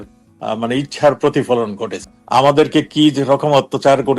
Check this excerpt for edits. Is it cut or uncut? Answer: cut